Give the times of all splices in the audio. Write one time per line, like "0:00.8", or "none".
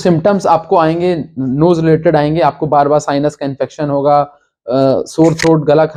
none